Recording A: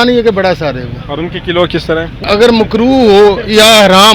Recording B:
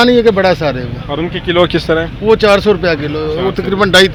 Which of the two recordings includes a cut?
A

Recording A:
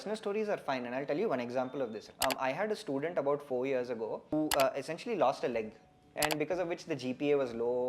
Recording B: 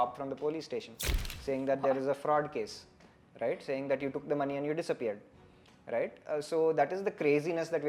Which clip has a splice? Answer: A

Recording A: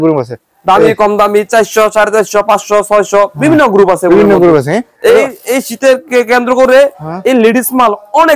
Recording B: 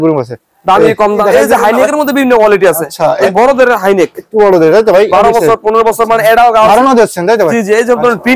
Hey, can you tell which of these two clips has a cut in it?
B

